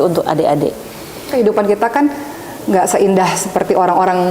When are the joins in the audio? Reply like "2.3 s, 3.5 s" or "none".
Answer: 1.3 s